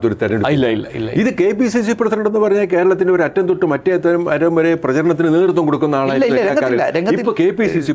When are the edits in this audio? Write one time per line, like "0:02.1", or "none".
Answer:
none